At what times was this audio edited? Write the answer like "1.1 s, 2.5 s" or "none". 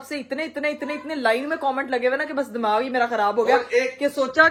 none